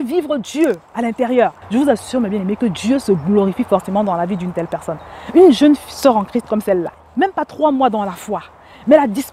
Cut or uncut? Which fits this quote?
cut